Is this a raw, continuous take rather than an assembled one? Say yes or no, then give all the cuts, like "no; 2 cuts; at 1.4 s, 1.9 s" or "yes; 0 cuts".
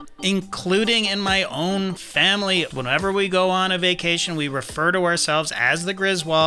no; 1 cut; at 2.7 s